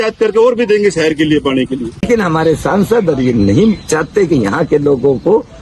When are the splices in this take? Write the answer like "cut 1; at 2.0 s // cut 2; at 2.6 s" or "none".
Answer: cut 1; at 2.1 s